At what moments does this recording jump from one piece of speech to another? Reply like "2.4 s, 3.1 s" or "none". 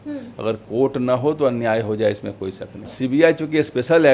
2.9 s